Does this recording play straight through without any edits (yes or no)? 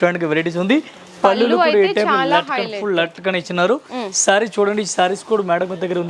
yes